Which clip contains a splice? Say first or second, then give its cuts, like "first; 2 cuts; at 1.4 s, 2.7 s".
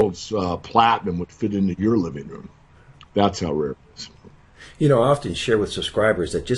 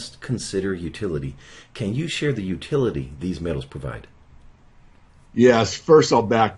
first; 1 cut; at 5.5 s